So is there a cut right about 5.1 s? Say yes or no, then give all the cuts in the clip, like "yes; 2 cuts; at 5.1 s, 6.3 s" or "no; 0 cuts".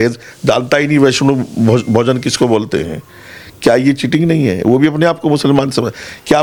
no; 0 cuts